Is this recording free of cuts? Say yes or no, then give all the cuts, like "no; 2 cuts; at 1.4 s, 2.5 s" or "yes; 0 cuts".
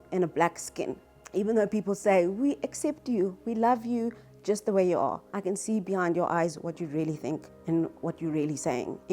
yes; 0 cuts